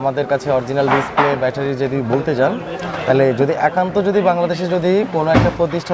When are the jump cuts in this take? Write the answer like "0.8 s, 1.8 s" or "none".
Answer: none